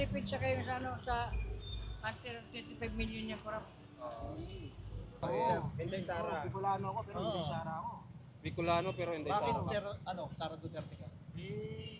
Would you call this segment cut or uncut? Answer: cut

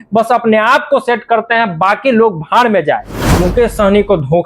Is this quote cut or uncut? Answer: cut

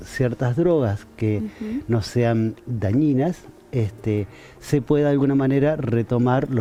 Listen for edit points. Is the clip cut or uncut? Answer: uncut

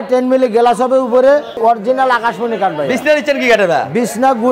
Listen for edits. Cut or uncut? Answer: cut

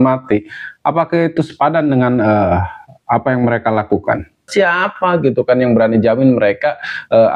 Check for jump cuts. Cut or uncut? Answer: cut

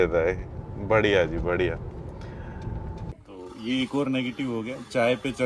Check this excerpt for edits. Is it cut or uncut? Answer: cut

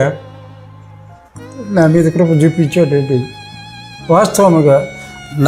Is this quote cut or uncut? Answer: uncut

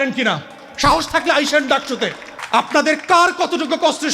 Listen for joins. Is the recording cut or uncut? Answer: cut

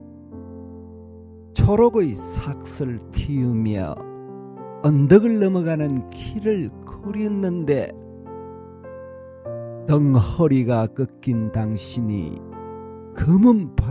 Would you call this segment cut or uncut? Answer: cut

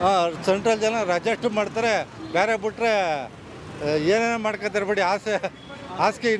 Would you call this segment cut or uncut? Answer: uncut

